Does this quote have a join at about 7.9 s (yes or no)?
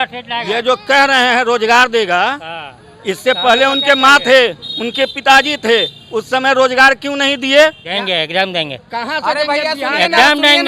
yes